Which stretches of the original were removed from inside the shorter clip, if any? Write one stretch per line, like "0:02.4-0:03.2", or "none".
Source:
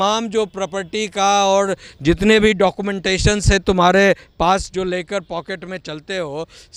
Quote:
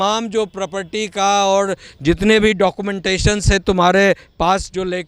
none